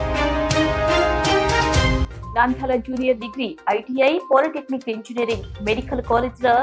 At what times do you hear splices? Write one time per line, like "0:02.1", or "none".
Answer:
0:02.0